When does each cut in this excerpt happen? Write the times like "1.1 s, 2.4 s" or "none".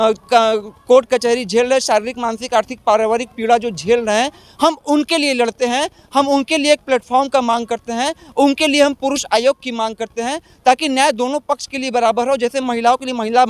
none